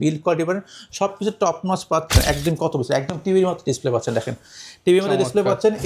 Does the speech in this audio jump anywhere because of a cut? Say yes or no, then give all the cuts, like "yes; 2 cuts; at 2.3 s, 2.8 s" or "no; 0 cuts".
yes; 1 cut; at 2.1 s